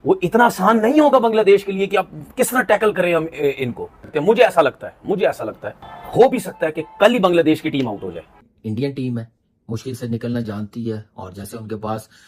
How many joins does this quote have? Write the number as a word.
one